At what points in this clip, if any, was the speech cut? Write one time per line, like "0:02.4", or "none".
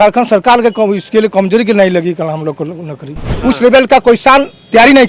0:03.3